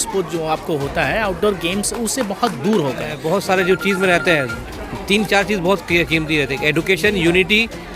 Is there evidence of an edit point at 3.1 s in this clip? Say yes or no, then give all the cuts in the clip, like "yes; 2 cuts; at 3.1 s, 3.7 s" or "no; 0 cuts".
yes; 1 cut; at 3.1 s